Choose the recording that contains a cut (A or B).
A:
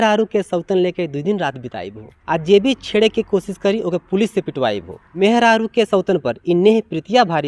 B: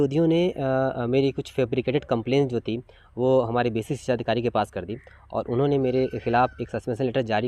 A